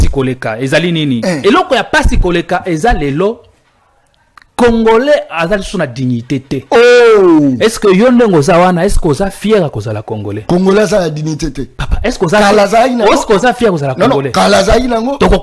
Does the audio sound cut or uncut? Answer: uncut